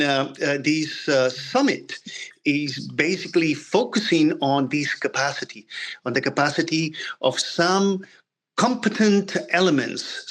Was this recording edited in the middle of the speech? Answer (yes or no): no